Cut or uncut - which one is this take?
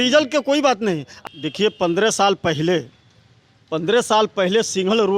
cut